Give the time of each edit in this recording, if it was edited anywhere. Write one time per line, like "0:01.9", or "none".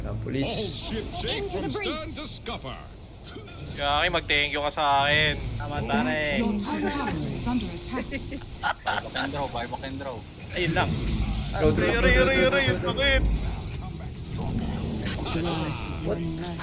none